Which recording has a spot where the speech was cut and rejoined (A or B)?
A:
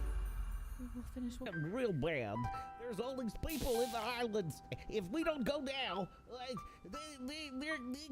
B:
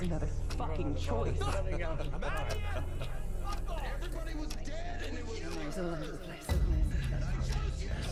A